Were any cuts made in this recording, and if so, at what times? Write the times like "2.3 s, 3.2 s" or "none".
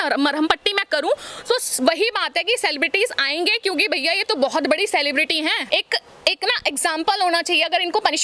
5.6 s

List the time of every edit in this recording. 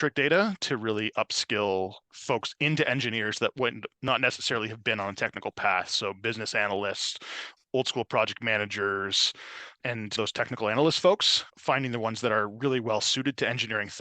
2.1 s

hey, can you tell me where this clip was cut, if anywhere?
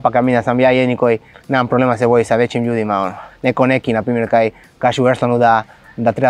1.3 s, 3.2 s

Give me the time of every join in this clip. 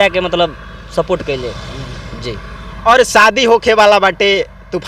none

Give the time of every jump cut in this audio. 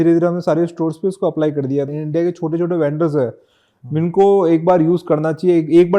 1.9 s

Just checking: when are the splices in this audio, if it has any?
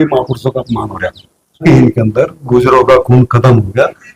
1.6 s

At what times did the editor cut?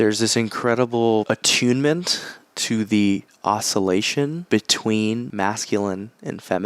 1.3 s, 4.4 s, 5.3 s

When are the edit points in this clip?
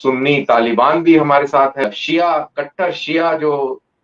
1.8 s

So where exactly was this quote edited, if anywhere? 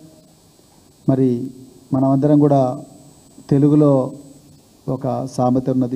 none

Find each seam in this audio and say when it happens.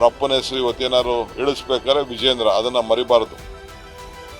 3.3 s

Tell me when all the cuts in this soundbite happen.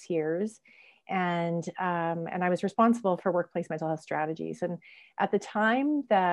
none

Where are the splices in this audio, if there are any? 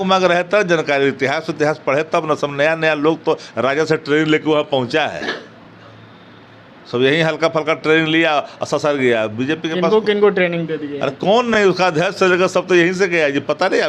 none

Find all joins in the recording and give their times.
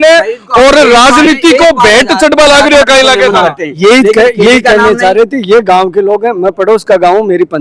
none

